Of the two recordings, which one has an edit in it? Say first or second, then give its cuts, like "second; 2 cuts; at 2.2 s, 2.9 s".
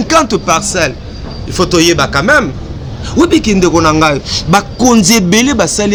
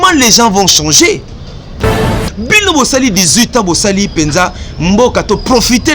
second; 1 cut; at 2.0 s